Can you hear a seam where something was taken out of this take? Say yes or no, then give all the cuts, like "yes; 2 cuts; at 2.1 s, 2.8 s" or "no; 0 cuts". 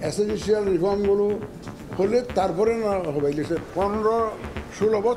yes; 1 cut; at 3.6 s